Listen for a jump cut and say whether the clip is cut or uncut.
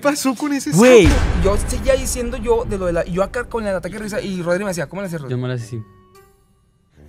cut